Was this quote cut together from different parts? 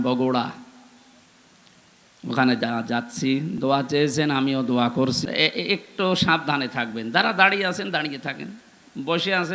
no; 0 cuts

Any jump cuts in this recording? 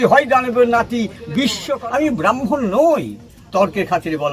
yes; 1 cut; at 1.7 s

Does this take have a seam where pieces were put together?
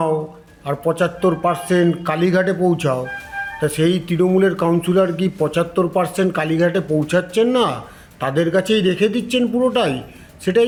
no; 0 cuts

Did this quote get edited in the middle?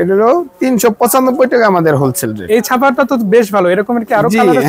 no; 0 cuts

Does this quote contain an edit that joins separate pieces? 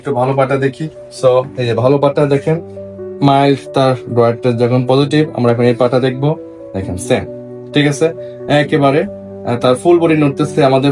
yes; 1 cut; at 0.9 s

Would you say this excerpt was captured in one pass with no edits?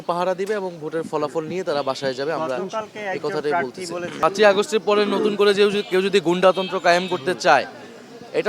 no; 1 cut; at 4.2 s

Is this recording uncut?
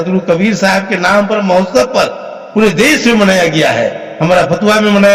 yes; 0 cuts

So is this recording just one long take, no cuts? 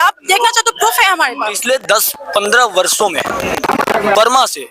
no; 1 cut; at 1.6 s

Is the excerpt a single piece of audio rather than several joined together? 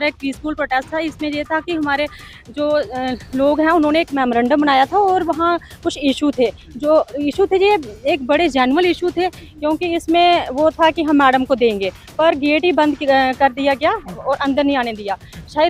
yes; 0 cuts

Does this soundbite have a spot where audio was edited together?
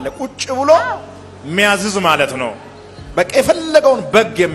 no; 0 cuts

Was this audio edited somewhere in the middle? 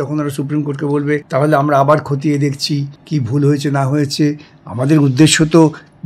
yes; 2 cuts; at 1.3 s, 2.9 s

